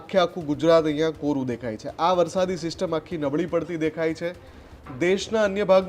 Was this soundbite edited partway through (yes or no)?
no